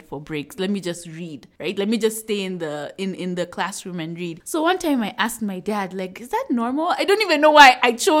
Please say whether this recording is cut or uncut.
uncut